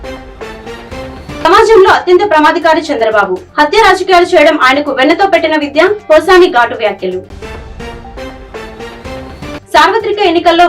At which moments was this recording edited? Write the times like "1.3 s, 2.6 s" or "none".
1.4 s